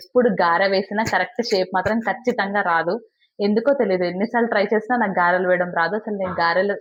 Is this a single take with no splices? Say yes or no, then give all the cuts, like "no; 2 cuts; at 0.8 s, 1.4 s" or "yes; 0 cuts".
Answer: yes; 0 cuts